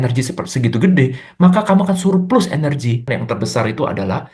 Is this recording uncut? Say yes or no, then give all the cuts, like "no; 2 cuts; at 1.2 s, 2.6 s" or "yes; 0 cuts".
no; 1 cut; at 3.0 s